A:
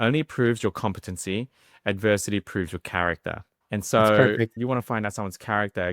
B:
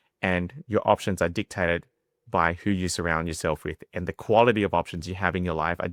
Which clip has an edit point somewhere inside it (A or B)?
A